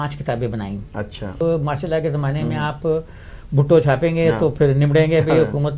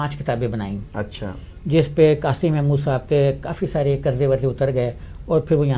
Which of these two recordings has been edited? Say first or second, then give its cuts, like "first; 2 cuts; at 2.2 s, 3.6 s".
first; 1 cut; at 1.3 s